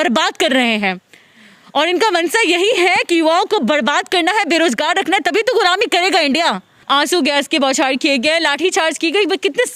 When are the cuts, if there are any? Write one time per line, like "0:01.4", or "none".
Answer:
0:06.7